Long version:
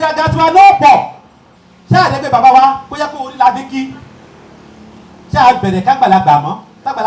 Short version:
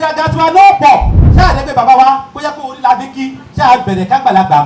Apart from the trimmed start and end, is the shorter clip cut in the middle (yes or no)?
yes